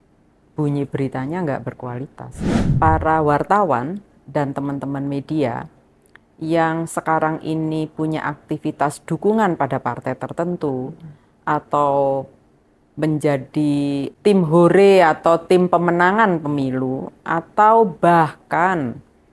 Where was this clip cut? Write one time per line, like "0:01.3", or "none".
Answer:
0:02.6
0:14.1